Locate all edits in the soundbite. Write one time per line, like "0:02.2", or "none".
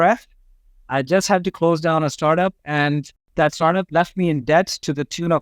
0:03.2